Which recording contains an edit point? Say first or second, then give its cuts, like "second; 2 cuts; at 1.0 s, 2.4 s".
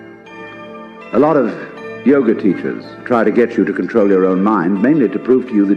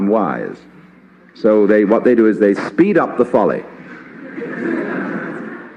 second; 1 cut; at 2.6 s